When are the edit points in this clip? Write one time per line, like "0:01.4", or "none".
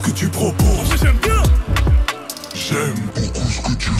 none